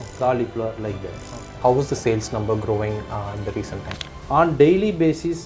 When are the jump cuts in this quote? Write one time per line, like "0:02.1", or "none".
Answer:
0:01.6
0:03.8